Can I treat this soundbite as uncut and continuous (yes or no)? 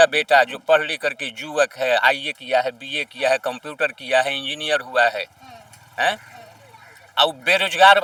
yes